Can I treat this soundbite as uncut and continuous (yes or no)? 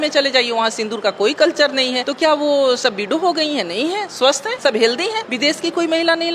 no